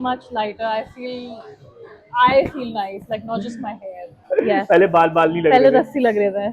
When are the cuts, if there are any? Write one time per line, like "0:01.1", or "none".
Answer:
0:04.3